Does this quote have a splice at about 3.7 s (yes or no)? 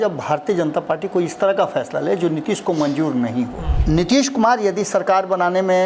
yes